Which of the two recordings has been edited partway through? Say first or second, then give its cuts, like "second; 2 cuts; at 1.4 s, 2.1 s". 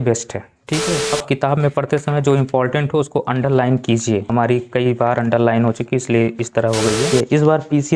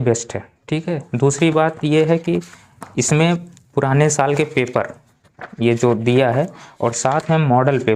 first; 3 cuts; at 1.1 s, 4.3 s, 7.1 s